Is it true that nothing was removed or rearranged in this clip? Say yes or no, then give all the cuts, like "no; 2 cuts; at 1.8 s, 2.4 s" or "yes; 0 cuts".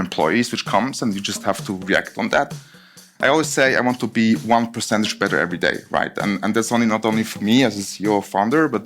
no; 1 cut; at 2.5 s